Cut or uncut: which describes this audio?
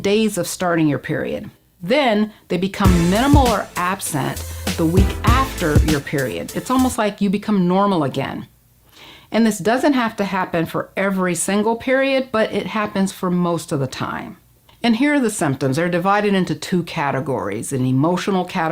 uncut